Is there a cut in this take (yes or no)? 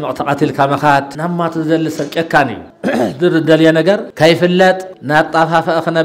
yes